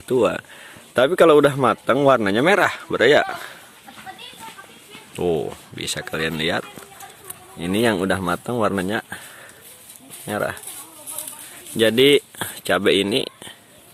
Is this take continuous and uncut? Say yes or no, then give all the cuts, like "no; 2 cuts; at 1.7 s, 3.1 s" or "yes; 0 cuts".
yes; 0 cuts